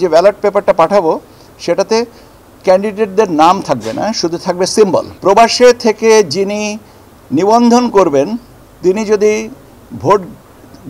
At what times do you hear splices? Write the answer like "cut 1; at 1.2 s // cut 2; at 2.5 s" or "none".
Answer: cut 1; at 5.1 s